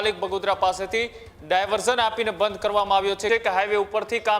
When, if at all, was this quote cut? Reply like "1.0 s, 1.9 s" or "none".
3.2 s